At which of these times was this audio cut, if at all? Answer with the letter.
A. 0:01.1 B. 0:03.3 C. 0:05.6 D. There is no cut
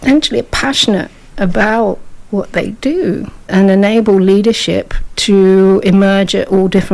D